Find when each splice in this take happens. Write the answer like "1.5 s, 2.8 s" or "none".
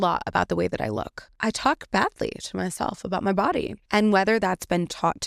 1.2 s, 3.8 s